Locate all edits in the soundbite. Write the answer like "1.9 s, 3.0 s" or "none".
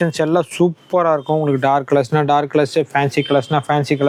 none